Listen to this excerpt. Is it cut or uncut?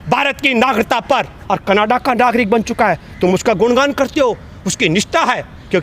uncut